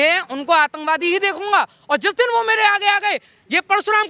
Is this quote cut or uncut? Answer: uncut